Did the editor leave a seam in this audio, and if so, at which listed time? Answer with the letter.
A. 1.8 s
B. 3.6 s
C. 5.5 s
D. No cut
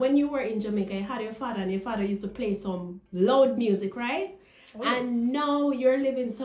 D